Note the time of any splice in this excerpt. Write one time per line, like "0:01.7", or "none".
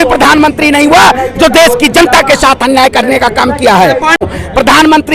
0:04.2